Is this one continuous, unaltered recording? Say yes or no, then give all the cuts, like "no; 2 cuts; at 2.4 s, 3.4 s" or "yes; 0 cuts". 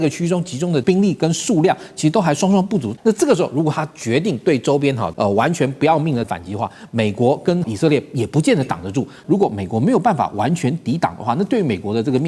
no; 6 cuts; at 0.8 s, 2.9 s, 5.1 s, 6.2 s, 7.7 s, 9.2 s